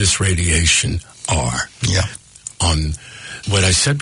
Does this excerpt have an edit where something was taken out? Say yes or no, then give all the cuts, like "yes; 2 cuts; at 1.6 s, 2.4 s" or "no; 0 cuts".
no; 0 cuts